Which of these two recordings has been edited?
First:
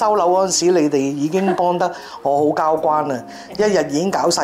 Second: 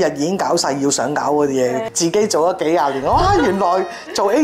second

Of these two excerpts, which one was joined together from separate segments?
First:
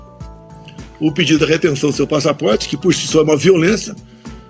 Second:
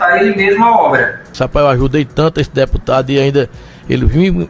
second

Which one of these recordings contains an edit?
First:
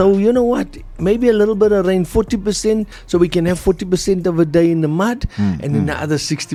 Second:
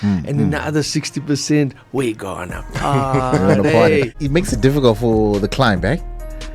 second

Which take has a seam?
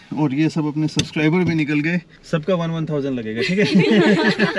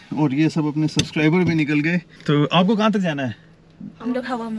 first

